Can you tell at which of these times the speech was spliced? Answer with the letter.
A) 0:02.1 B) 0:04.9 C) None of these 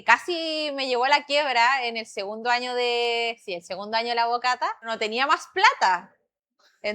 B